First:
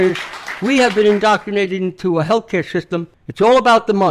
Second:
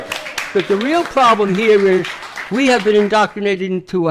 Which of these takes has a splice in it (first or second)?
first